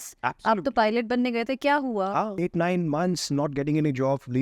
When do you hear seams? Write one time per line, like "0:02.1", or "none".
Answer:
0:02.4